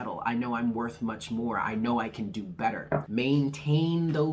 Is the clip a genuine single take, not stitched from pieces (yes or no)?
no